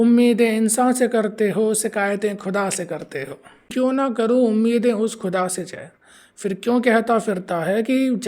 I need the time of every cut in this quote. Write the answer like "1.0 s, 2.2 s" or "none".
3.7 s